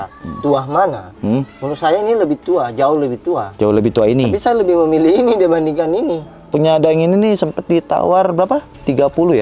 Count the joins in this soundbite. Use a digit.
1